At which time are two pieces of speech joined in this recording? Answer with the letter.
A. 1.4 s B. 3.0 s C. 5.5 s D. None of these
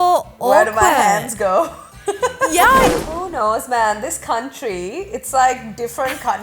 B